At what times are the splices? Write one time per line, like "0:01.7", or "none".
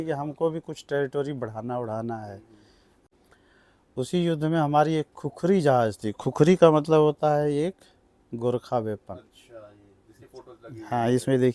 0:03.0

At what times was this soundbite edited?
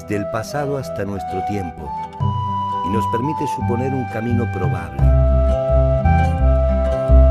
none

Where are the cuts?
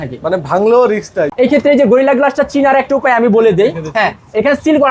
0:01.3

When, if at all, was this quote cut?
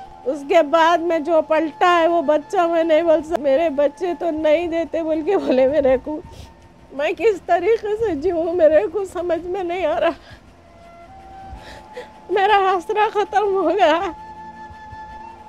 0:03.3

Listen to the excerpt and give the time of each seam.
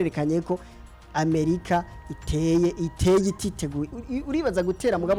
none

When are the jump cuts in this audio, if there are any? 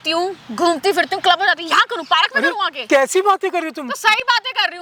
none

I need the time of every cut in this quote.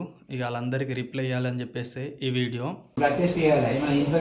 0:03.0

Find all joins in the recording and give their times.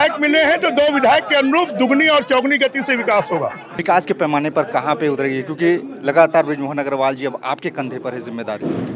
0:03.7

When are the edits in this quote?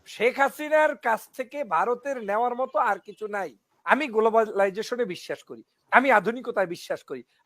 0:03.9

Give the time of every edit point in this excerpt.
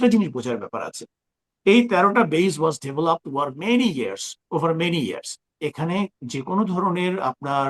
0:05.6

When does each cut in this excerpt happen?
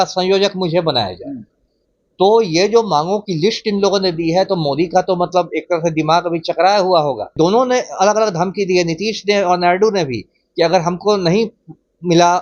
0:07.3

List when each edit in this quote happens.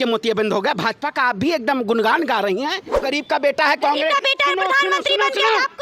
0:03.0

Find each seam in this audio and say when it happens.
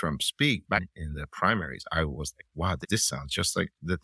0:00.9
0:02.8

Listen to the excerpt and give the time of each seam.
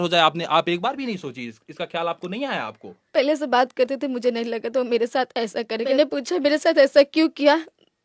0:06.0

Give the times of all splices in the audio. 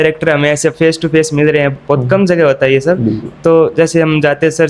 none

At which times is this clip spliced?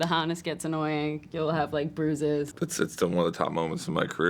0:02.5

